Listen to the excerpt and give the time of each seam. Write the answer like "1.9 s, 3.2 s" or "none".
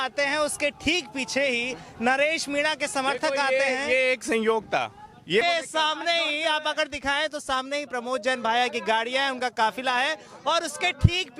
5.4 s